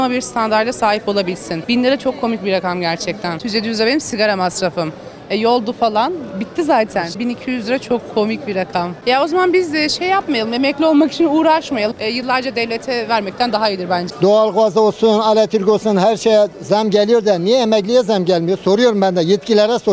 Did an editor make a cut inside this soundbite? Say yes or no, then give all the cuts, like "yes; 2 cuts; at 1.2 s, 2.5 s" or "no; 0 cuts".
yes; 6 cuts; at 1.5 s, 3.4 s, 7.1 s, 8.9 s, 11.9 s, 14.1 s